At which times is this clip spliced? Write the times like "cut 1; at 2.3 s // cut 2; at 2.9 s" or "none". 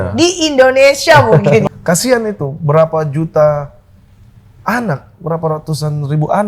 cut 1; at 1.6 s